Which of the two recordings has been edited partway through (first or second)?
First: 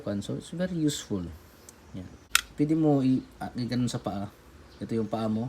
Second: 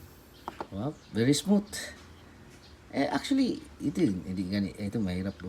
first